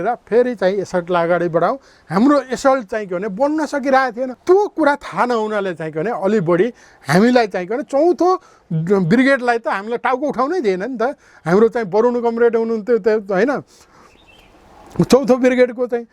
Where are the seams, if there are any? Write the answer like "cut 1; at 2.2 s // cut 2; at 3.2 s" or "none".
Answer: cut 1; at 4.3 s